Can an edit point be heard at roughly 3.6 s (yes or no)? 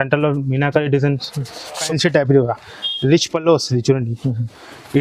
no